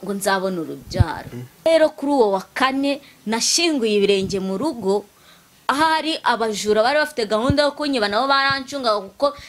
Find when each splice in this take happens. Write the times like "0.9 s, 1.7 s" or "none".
1.7 s